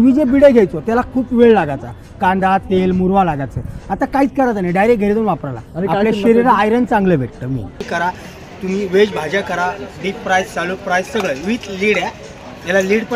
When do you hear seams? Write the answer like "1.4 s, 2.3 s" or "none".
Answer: 7.8 s